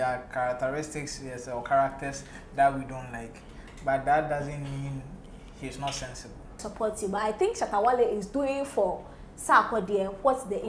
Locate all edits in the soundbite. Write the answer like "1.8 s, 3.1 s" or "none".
6.6 s

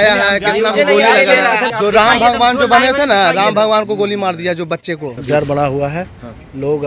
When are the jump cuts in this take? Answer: 1.7 s, 5.1 s

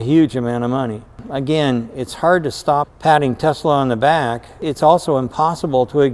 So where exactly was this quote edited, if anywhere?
1.2 s, 2.9 s, 4.6 s

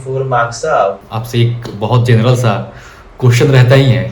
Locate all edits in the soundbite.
1.0 s

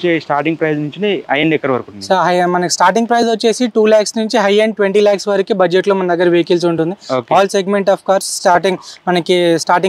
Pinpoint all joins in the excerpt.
none

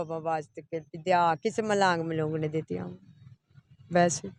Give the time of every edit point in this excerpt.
none

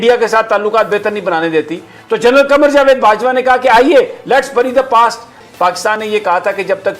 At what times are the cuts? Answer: 5.4 s

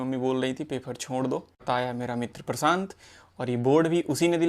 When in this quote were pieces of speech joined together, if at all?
1.6 s

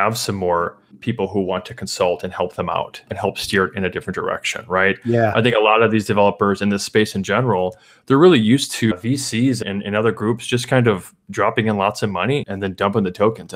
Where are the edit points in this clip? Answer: 3.1 s, 9.6 s, 12.5 s

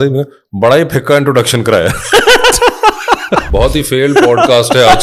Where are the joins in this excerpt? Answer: 3.5 s

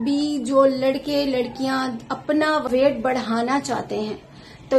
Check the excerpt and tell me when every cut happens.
2.7 s

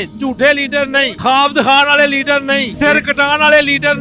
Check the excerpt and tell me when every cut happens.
1.1 s, 2.7 s

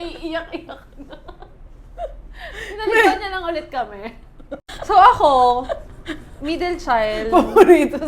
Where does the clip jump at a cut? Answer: 4.7 s

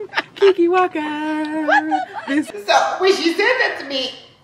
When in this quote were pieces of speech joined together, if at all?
2.5 s

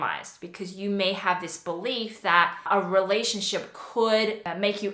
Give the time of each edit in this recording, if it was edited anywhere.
2.7 s

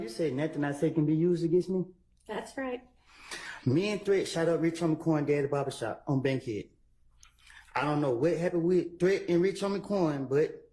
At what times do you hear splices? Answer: none

